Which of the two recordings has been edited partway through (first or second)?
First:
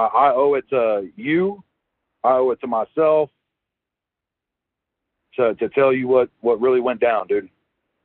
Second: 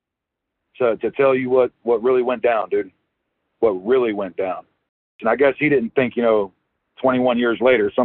second